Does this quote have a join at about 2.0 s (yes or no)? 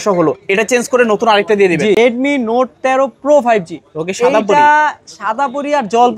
yes